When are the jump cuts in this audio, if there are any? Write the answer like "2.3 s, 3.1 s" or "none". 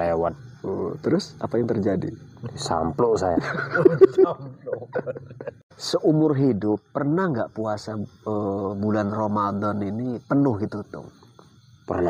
5.7 s